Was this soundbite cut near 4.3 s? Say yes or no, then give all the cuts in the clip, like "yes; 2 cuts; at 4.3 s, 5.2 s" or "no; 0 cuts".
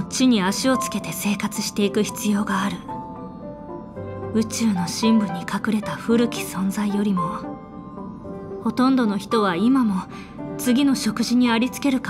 yes; 2 cuts; at 2.9 s, 4.3 s